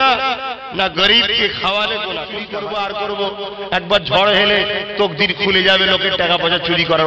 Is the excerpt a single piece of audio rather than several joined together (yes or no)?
no